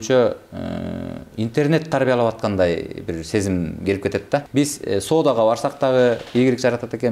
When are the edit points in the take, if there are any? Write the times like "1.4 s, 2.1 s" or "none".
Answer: 4.5 s